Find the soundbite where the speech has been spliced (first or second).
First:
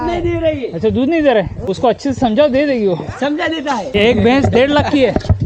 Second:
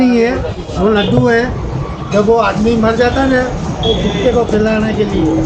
first